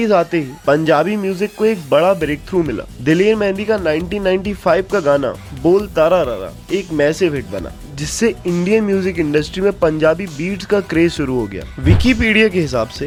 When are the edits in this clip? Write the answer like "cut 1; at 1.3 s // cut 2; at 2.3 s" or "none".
none